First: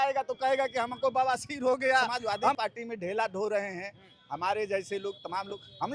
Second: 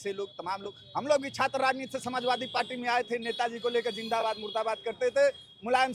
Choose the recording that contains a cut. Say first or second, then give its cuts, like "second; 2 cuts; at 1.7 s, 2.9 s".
first; 1 cut; at 2.6 s